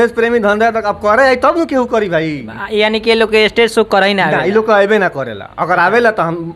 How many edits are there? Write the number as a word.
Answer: zero